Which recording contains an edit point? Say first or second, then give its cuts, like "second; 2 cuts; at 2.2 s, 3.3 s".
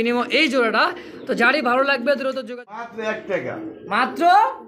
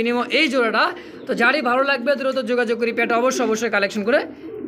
first; 1 cut; at 2.5 s